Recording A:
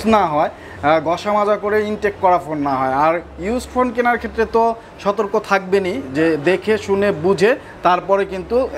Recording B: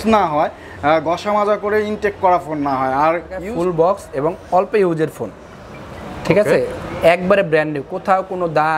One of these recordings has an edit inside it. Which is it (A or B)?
B